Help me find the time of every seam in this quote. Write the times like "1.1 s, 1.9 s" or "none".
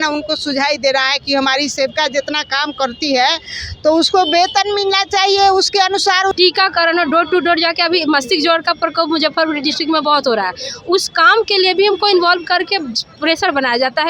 6.3 s